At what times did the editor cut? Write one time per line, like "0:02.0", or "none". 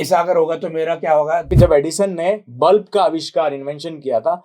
0:01.5

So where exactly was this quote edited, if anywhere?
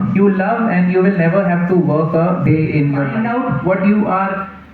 0:03.1

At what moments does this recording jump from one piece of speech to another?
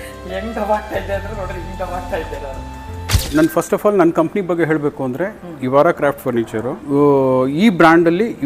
0:03.2
0:06.8

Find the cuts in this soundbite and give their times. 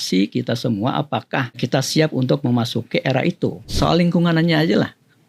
0:01.6
0:03.6

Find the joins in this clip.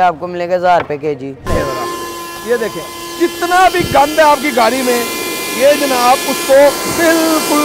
0:01.5

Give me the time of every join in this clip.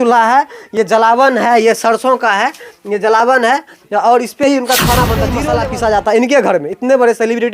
0:05.4

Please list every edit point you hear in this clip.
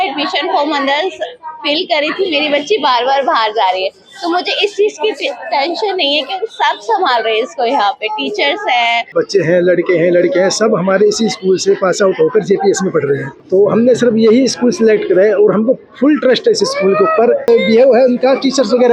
0:09.0
0:13.3
0:17.5

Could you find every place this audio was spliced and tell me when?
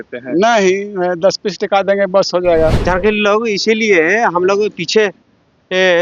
0:02.8

